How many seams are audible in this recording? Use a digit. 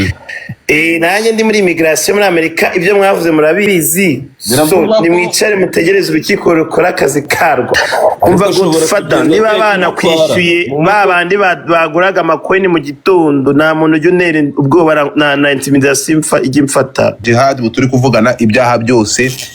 2